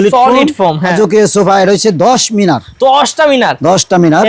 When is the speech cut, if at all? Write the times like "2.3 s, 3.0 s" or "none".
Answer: 0.9 s